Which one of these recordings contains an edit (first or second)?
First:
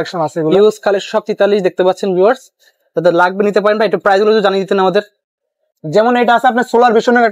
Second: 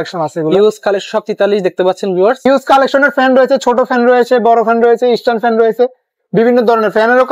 second